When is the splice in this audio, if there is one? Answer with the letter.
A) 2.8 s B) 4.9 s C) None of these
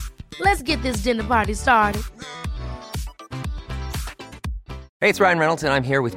B